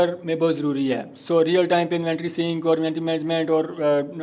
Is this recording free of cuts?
yes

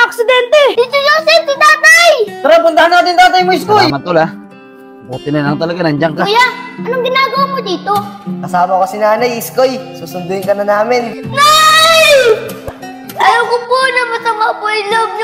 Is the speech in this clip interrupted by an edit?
yes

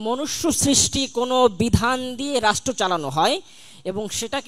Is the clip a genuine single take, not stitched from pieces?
yes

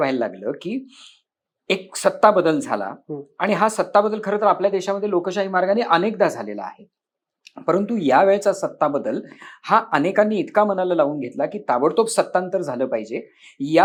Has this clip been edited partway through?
no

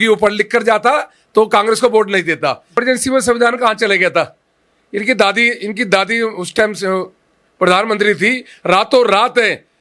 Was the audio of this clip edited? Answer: yes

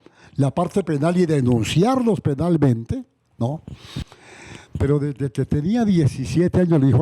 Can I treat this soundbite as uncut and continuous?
no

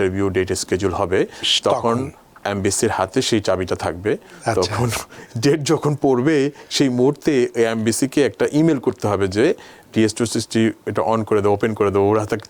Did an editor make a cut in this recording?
no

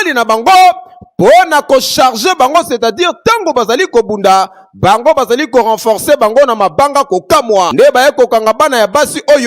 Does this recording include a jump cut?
yes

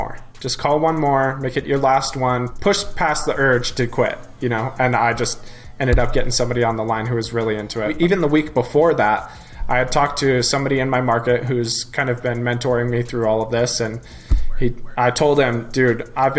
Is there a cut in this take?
yes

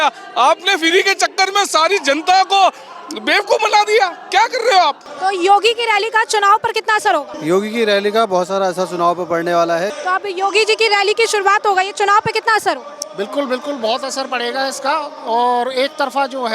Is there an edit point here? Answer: yes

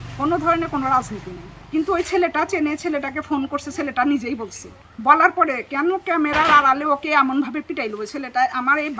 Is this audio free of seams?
yes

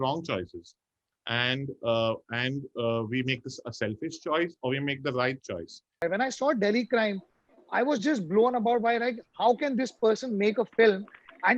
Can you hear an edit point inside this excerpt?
yes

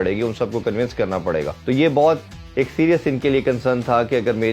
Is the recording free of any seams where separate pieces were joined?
no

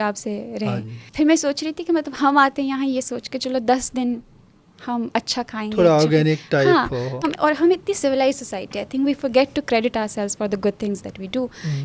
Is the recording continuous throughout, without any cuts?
no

